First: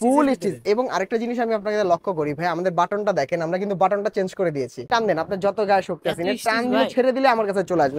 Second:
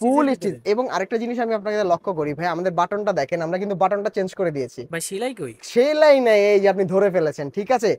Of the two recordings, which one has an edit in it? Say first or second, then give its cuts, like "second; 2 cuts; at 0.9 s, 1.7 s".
first; 1 cut; at 4.8 s